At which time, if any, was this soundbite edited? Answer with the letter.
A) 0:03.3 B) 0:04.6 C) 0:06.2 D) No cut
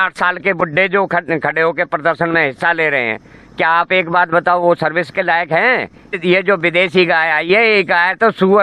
C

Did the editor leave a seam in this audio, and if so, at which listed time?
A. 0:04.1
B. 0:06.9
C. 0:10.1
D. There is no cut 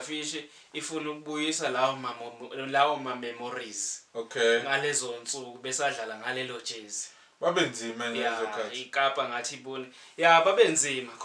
D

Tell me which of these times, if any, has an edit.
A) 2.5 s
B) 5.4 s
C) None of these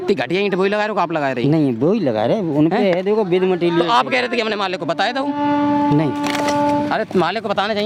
C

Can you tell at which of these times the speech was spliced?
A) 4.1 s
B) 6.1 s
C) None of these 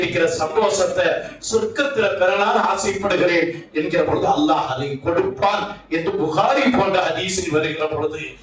C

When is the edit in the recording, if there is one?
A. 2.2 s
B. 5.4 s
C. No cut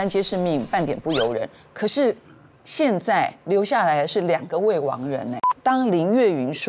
B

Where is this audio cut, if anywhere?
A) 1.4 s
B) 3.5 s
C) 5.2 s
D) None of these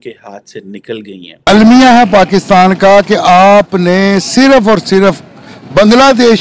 A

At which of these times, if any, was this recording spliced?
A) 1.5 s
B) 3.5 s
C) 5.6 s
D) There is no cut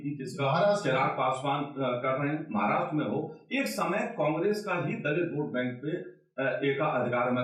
D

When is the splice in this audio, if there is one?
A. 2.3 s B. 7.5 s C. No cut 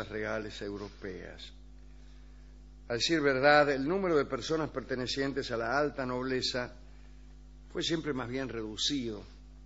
B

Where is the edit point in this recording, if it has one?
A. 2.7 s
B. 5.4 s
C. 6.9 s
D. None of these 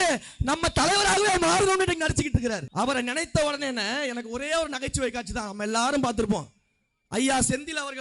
A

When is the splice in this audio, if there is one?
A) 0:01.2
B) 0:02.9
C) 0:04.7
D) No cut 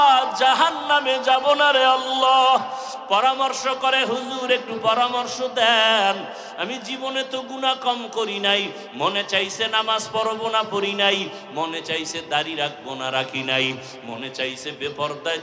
B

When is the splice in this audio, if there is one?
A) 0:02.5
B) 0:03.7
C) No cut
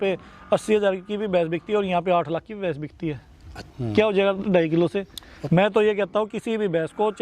B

